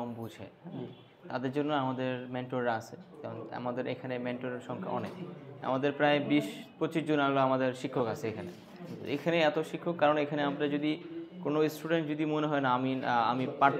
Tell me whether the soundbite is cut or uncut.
uncut